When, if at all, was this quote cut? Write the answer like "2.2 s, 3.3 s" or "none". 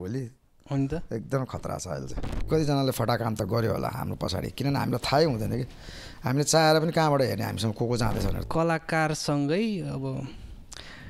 2.5 s, 8.4 s

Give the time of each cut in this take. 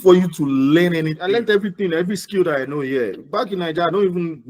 1.2 s

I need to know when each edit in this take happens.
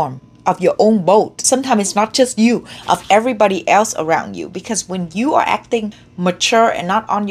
1.4 s, 6.0 s

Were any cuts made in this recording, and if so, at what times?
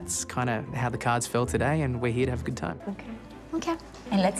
2.9 s

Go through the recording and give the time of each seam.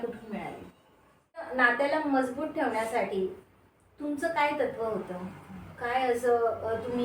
1.5 s

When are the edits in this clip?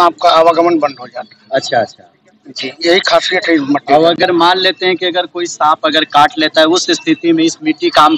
none

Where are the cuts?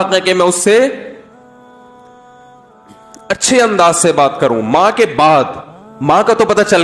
1.2 s, 3.3 s

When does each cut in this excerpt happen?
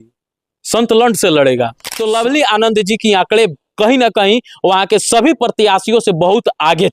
1.9 s

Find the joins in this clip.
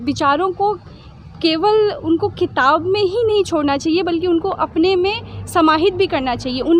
none

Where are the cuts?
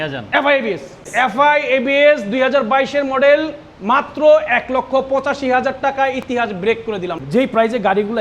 1.1 s, 7.2 s

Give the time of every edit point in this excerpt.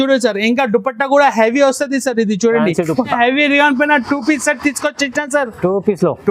3.1 s

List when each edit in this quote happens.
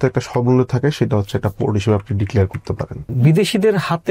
3.1 s

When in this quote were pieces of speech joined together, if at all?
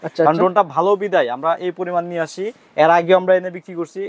none

